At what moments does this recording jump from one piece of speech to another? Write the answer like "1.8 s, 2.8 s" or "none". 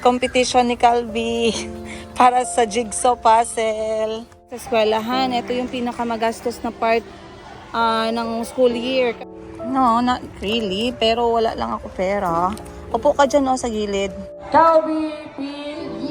4.6 s, 9.2 s, 14.3 s